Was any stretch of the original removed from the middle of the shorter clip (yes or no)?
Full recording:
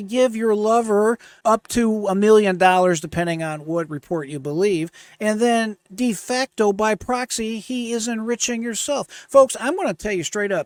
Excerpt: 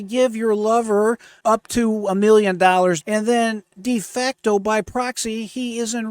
yes